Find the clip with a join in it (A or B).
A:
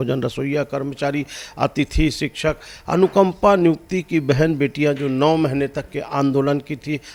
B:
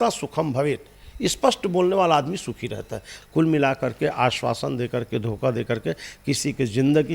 B